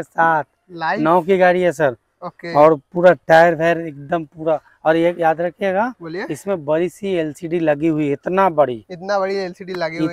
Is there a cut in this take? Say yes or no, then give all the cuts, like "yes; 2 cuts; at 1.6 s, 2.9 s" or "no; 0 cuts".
no; 0 cuts